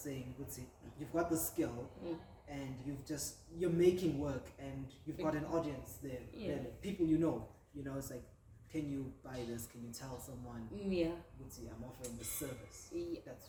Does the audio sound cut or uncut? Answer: uncut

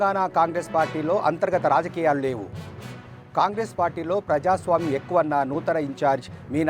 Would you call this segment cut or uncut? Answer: uncut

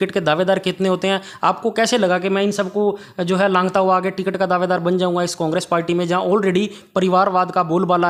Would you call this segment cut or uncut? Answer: uncut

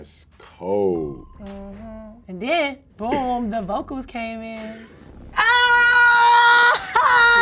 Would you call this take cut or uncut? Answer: cut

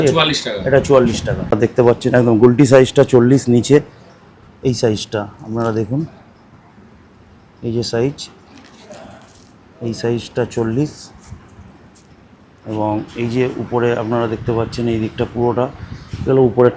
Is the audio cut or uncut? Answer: cut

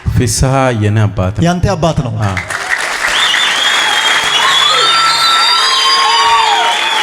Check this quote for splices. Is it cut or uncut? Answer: uncut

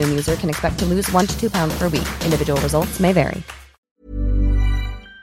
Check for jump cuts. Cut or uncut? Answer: cut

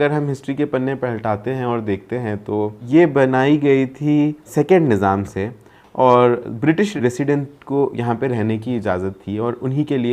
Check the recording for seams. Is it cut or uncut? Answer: cut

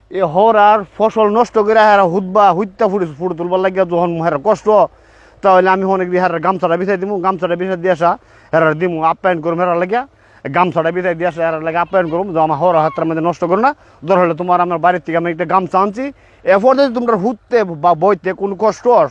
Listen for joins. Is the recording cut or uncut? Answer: uncut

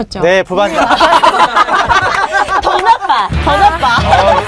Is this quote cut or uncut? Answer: uncut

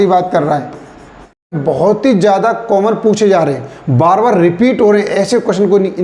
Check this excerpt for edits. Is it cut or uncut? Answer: cut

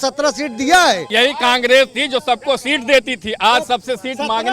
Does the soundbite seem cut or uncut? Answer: cut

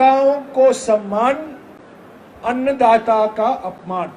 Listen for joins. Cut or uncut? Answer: uncut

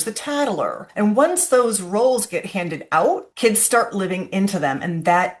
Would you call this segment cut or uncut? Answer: cut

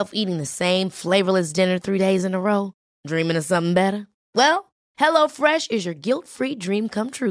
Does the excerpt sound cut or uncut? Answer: uncut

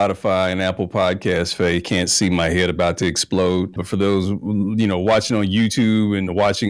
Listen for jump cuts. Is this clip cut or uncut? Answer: cut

